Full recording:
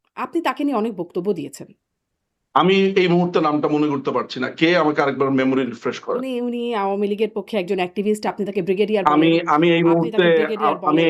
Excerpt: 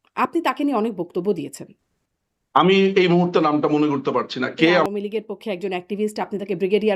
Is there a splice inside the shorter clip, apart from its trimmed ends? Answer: yes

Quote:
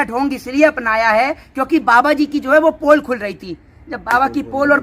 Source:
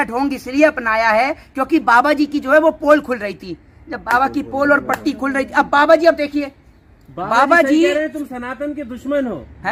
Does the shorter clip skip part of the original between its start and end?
no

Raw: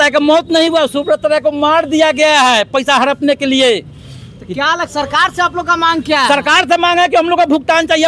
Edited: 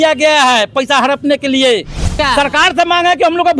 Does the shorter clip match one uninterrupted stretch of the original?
no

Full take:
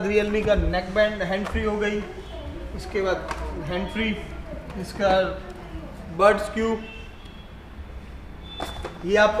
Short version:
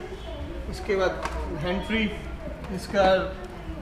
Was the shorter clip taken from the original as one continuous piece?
yes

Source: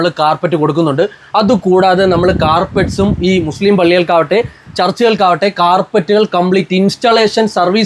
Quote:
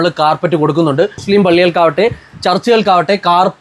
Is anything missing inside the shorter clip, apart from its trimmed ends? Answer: yes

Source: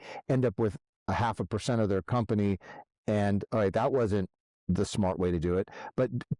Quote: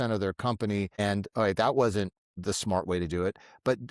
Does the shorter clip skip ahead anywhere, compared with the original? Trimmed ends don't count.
yes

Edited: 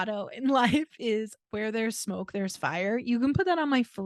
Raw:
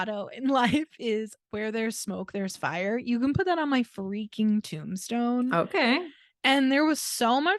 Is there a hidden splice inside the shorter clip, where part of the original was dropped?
no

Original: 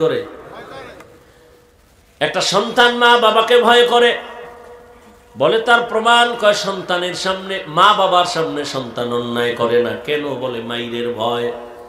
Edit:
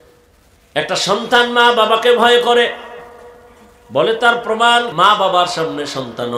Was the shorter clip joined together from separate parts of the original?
yes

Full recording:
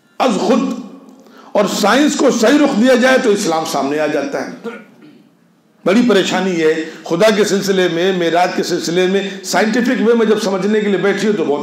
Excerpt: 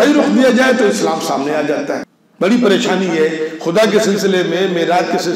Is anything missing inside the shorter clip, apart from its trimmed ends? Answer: yes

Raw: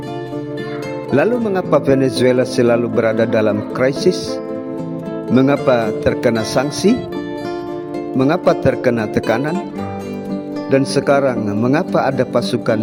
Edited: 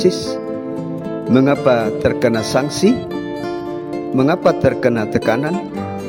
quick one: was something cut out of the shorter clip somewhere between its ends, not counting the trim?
no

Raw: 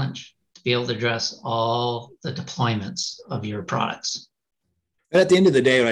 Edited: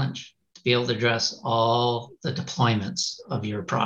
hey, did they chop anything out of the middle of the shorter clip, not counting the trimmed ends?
no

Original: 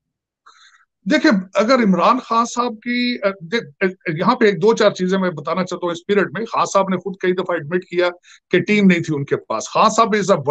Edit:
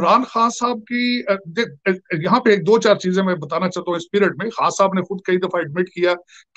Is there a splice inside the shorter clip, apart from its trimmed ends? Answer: no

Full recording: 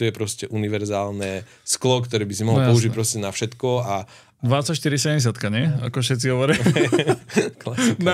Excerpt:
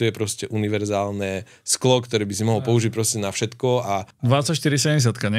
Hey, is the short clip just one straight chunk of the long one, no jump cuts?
no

